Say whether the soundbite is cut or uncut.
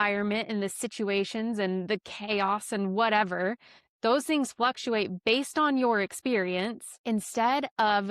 cut